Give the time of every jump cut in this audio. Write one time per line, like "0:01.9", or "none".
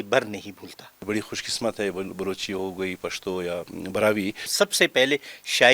0:01.0
0:04.5